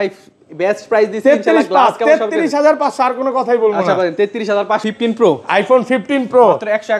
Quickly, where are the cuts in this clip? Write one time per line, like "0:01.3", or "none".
0:04.8